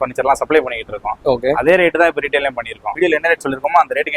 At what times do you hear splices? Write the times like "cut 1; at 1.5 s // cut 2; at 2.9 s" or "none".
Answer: cut 1; at 2.9 s

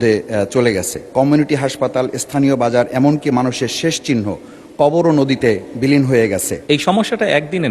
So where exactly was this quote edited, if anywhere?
cut 1; at 1.0 s // cut 2; at 6.5 s

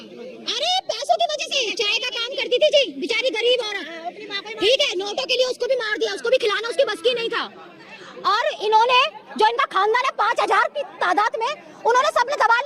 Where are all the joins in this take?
none

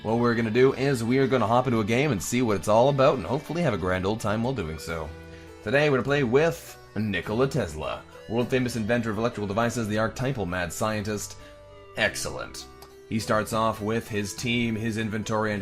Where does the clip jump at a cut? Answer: none

